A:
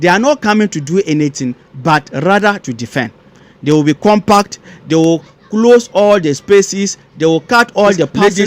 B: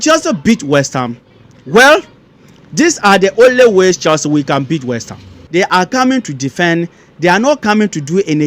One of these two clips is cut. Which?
B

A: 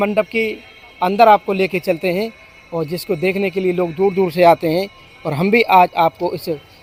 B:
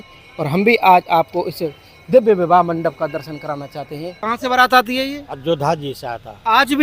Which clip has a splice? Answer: B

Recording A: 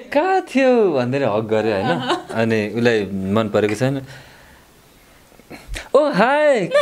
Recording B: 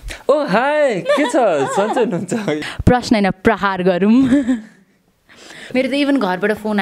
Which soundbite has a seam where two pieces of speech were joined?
B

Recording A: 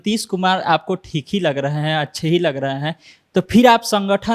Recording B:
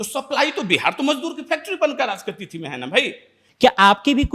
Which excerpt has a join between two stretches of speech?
B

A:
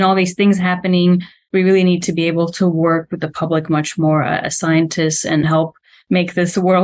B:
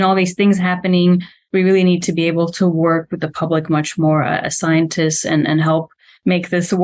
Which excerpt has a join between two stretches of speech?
A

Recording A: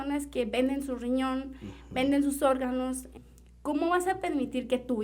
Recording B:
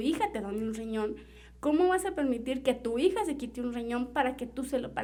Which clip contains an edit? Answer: A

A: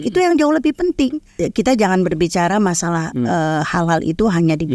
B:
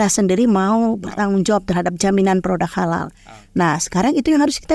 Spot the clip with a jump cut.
A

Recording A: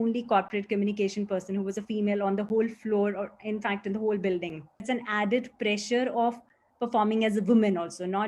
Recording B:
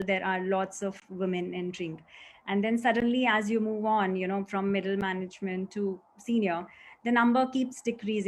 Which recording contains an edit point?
A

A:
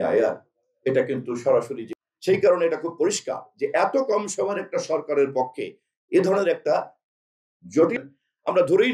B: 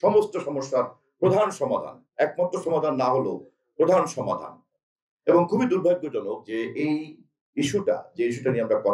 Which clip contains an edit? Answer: A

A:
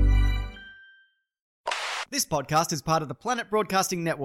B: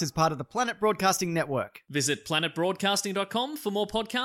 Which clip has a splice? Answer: A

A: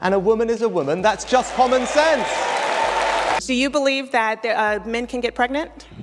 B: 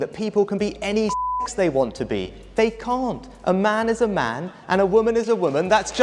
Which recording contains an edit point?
A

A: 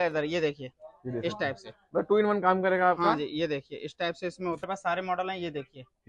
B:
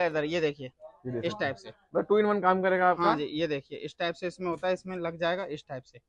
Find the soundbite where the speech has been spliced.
A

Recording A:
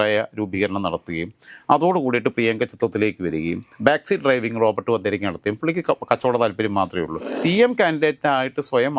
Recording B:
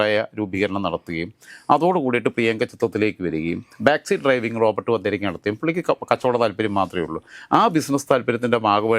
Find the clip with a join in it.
A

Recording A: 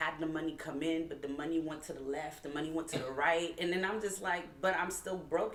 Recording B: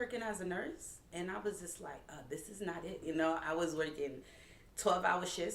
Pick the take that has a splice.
B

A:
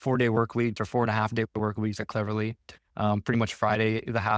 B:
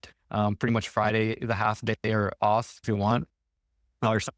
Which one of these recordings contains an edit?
B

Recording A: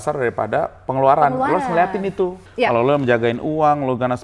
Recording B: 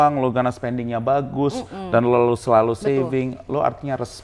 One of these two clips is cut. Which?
A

